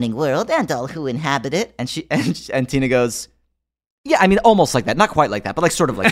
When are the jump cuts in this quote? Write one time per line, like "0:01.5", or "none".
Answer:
none